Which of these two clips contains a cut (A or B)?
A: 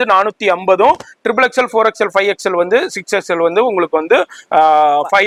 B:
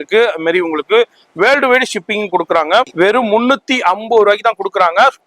B